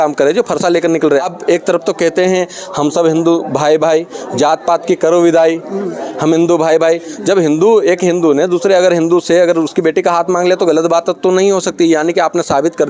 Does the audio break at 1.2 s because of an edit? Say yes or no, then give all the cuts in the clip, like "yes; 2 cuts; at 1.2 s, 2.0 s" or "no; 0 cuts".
yes; 1 cut; at 1.2 s